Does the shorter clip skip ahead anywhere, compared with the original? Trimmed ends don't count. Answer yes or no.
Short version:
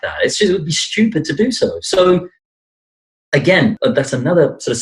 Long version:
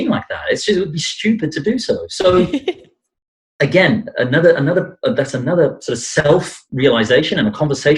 yes